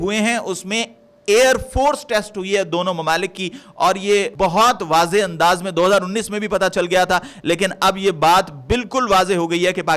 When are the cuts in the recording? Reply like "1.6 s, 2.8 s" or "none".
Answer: 4.3 s